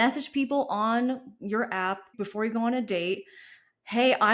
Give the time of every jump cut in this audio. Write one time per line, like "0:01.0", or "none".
0:02.1